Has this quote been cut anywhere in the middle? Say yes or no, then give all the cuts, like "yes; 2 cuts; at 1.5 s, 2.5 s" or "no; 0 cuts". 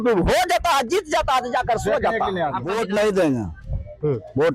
yes; 1 cut; at 2.7 s